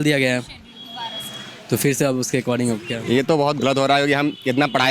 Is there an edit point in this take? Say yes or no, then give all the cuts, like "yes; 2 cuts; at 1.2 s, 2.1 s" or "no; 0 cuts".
yes; 1 cut; at 2.9 s